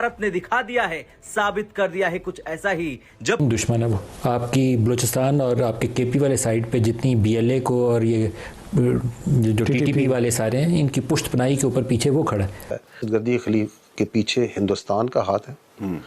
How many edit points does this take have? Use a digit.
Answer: 2